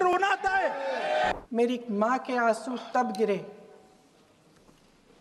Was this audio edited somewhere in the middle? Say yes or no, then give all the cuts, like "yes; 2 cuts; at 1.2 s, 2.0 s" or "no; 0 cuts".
yes; 1 cut; at 1.3 s